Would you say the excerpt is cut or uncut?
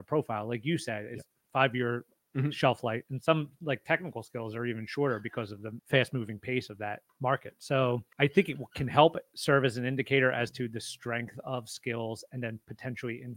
cut